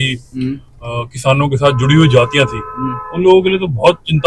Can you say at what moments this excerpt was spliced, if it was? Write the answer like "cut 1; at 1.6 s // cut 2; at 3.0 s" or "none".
none